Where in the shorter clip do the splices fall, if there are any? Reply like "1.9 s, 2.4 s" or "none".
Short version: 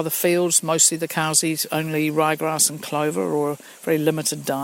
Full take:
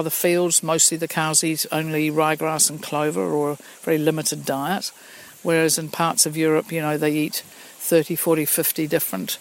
none